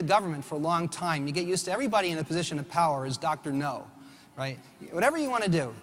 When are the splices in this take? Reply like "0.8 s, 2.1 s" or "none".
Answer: 2.9 s